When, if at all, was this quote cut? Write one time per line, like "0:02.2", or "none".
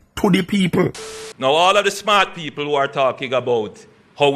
0:01.0

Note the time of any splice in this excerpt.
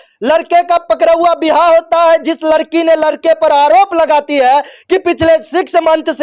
none

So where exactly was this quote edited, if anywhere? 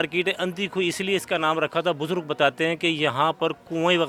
none

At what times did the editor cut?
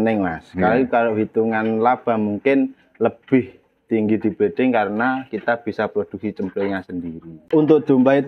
0:07.4

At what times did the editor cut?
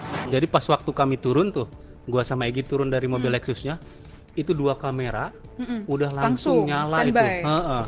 none

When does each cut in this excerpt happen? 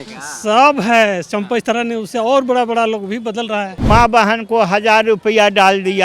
0:03.8

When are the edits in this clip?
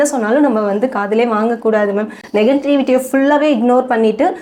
none

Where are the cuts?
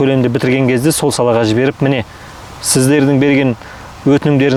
none

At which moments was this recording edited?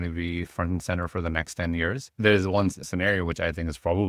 0:02.0

